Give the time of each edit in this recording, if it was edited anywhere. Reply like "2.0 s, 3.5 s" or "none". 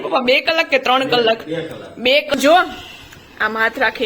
2.3 s

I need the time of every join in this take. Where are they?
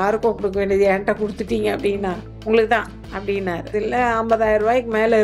2.3 s, 3.7 s

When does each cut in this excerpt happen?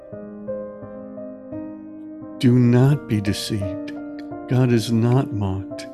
1.9 s

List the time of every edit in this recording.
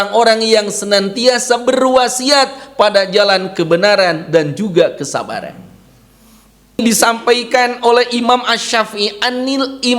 6.8 s

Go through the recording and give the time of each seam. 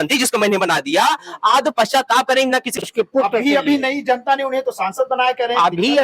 2.8 s

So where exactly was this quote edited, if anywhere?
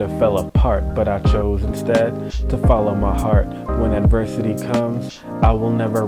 none

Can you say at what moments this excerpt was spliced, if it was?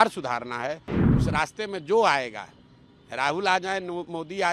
0.9 s

